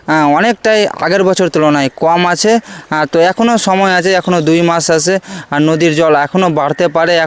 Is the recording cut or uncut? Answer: uncut